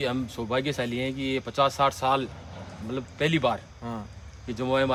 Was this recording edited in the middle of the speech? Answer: no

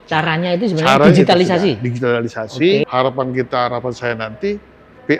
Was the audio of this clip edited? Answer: yes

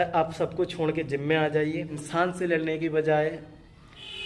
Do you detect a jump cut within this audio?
yes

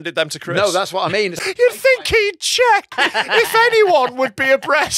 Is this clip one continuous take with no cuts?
no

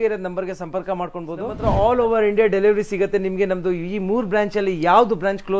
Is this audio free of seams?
no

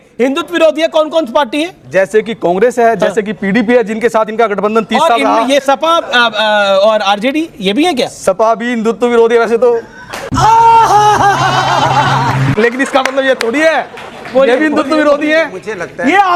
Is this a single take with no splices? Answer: yes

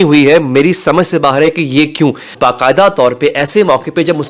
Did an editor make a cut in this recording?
yes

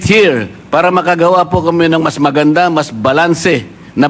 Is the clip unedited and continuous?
yes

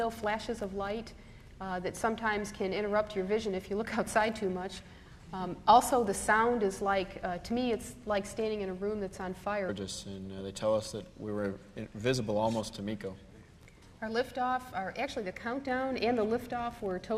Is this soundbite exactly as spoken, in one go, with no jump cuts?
yes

